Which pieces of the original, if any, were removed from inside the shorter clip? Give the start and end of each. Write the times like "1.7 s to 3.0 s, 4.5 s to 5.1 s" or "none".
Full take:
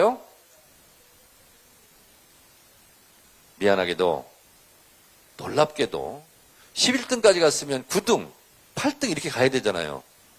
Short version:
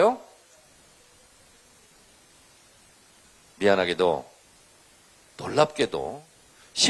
none